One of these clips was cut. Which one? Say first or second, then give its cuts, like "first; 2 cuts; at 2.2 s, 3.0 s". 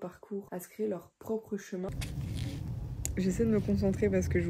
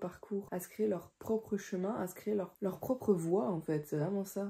first; 1 cut; at 1.9 s